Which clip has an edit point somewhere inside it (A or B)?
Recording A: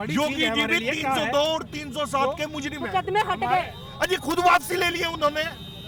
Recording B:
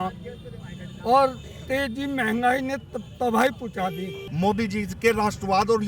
B